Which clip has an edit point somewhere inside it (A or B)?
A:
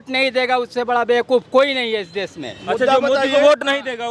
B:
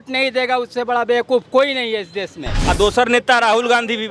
B